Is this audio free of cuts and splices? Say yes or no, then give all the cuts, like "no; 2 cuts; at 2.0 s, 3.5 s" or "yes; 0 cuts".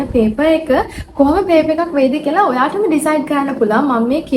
yes; 0 cuts